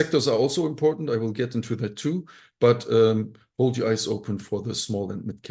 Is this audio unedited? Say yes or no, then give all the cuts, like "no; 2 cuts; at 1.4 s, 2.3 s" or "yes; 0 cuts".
yes; 0 cuts